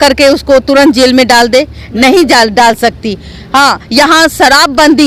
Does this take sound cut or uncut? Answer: uncut